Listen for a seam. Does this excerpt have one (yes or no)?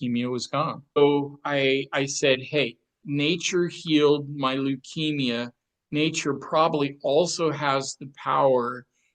yes